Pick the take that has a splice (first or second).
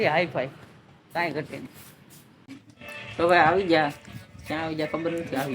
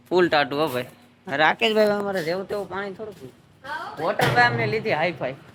first